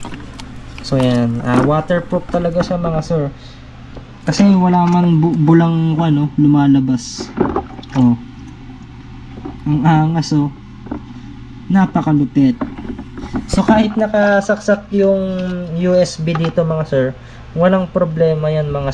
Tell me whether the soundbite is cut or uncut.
uncut